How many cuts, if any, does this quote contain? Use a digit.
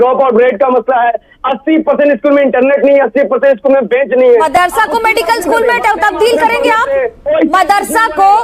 0